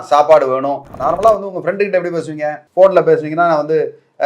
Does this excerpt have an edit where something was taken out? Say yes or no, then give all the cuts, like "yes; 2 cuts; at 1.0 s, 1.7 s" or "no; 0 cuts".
yes; 2 cuts; at 0.9 s, 2.6 s